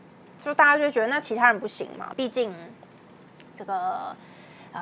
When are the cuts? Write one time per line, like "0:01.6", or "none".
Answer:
0:02.1